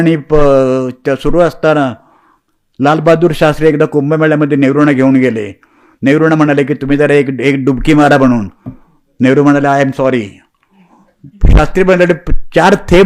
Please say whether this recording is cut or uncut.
uncut